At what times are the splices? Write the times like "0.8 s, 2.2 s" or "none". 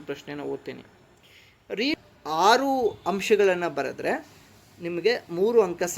1.9 s